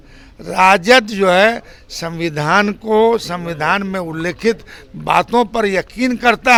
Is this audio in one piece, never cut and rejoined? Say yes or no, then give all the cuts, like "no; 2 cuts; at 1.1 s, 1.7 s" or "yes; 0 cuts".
yes; 0 cuts